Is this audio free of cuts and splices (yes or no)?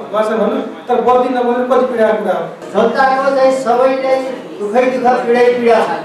no